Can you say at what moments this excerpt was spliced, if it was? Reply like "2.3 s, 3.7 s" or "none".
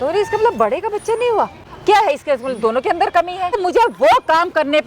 3.5 s